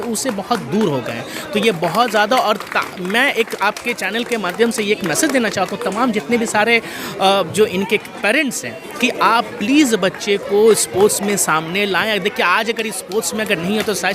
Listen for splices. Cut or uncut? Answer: uncut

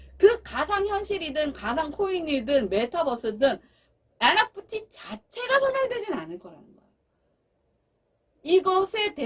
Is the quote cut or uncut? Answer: uncut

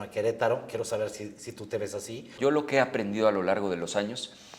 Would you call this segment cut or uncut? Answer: cut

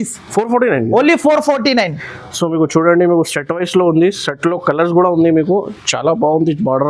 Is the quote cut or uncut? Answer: uncut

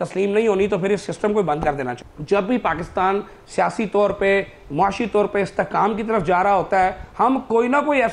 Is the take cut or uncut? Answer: cut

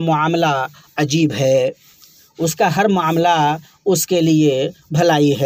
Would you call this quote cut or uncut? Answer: uncut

